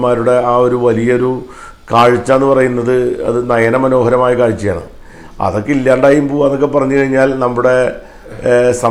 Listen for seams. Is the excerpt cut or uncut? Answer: uncut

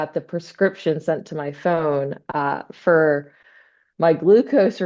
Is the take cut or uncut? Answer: uncut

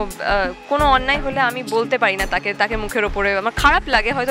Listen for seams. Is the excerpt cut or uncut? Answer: uncut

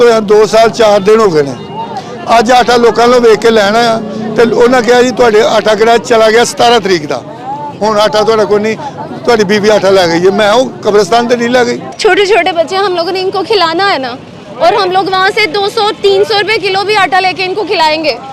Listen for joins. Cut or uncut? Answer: cut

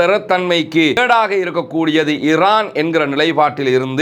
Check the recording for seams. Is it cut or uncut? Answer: cut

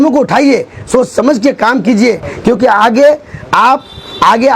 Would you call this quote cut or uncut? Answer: uncut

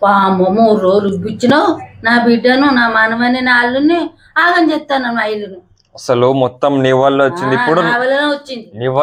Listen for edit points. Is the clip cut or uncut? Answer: uncut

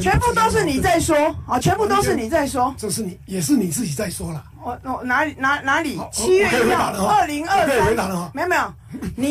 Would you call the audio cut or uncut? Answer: uncut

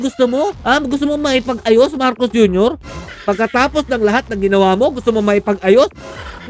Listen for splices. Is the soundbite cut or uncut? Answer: uncut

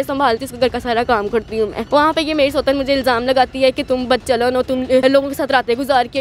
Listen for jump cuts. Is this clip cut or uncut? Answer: cut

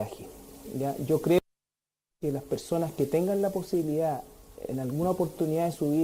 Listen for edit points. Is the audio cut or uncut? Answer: cut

